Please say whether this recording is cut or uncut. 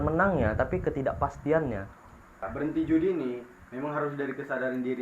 cut